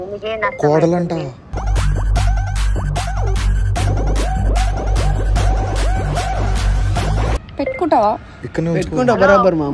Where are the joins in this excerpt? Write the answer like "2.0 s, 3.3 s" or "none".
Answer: 7.4 s